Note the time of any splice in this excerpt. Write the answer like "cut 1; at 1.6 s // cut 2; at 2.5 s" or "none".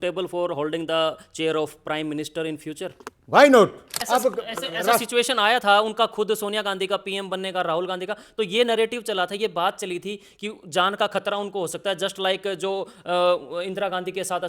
cut 1; at 3.9 s